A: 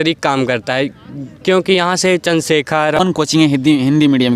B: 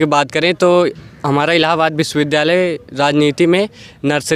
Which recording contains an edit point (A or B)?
A